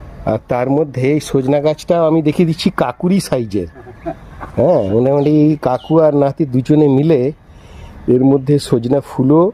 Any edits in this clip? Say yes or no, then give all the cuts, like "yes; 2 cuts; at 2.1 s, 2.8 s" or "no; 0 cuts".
no; 0 cuts